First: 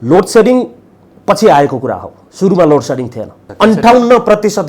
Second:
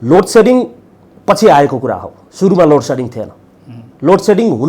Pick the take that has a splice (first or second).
first